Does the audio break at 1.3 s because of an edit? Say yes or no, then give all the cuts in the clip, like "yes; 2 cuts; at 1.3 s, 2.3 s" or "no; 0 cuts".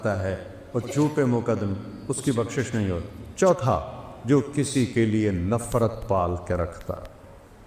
no; 1 cut; at 3.3 s